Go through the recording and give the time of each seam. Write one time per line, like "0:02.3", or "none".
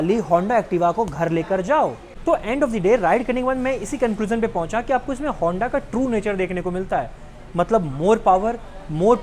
0:02.1